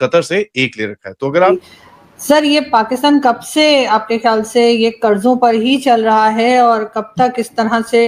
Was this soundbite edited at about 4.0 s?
no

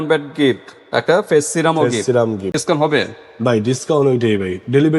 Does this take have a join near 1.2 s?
no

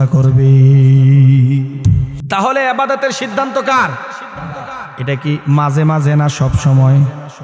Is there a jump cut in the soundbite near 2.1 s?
yes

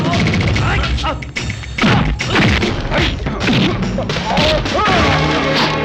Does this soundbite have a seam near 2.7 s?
yes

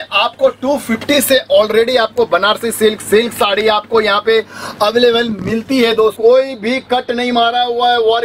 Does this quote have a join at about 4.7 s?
no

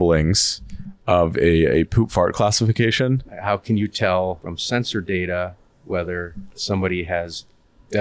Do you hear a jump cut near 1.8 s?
no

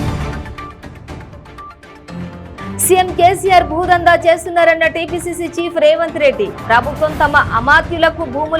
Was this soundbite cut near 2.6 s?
yes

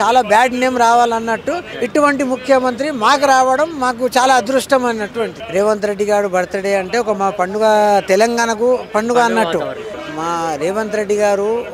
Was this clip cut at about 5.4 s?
yes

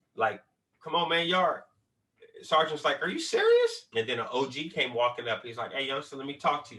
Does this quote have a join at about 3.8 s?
yes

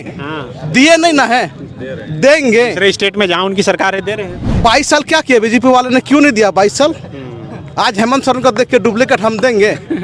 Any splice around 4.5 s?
yes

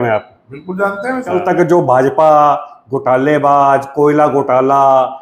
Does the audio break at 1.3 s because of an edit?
yes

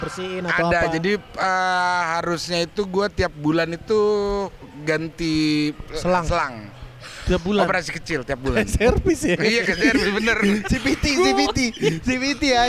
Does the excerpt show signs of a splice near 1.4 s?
no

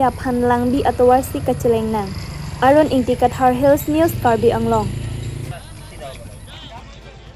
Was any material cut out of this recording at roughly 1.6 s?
no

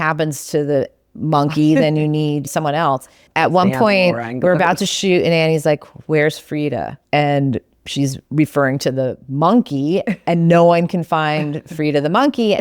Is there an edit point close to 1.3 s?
no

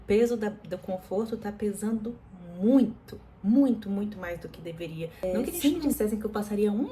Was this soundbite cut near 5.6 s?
yes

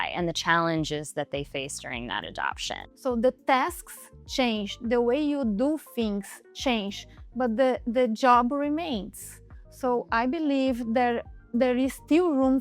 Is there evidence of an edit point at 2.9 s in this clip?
yes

